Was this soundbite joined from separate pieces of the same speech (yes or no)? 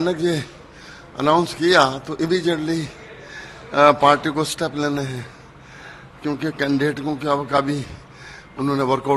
no